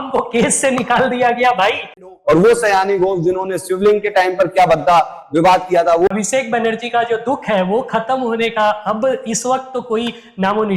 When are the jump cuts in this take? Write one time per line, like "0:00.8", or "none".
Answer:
0:02.1
0:06.1